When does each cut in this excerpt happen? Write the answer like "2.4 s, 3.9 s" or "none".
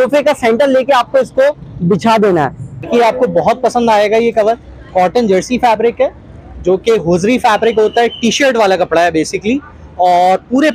2.9 s